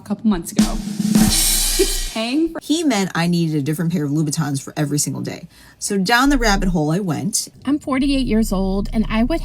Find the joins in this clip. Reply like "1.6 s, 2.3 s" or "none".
2.6 s, 7.4 s

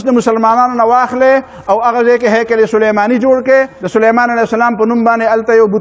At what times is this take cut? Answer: 3.8 s

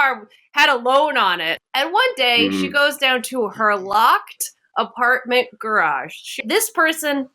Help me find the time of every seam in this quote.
1.6 s, 6.4 s

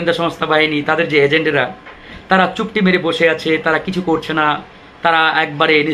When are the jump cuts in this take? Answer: none

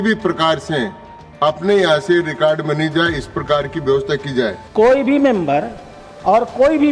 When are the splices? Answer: 4.6 s

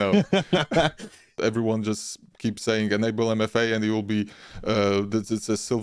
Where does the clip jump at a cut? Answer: 1.4 s

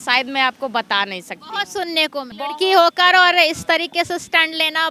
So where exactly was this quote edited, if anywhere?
none

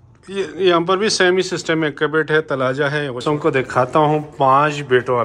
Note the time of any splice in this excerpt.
3.2 s

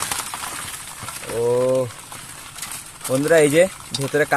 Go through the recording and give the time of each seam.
none

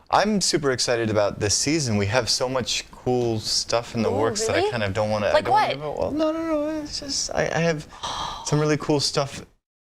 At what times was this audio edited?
1.1 s

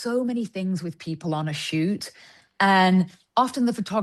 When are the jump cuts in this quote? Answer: none

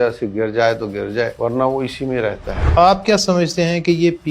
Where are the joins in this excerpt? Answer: 1.3 s, 2.7 s

